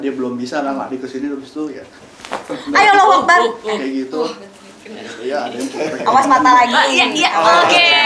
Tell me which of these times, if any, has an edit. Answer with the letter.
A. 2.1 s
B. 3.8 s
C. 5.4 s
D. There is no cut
D